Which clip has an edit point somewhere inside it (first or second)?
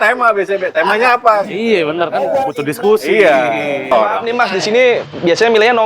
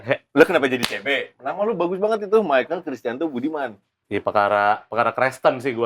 first